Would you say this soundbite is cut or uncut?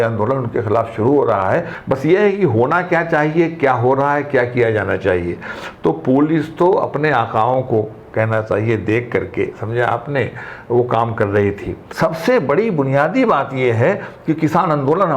cut